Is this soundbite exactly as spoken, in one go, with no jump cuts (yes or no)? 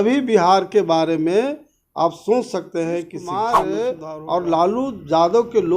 no